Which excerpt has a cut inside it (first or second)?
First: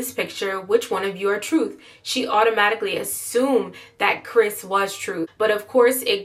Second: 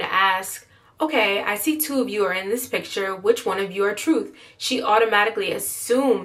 first